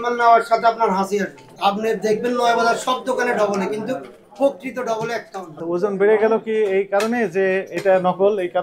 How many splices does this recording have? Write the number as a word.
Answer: two